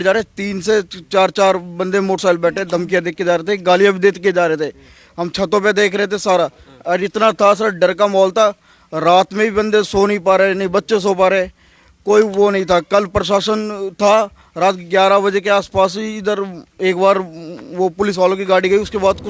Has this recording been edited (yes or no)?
no